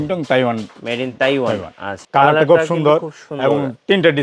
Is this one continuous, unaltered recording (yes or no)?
no